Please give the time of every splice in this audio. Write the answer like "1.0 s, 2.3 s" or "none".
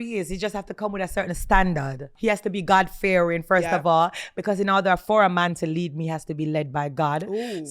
2.1 s